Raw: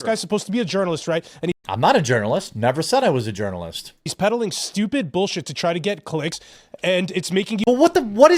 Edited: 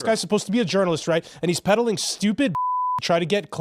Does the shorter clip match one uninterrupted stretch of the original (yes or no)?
no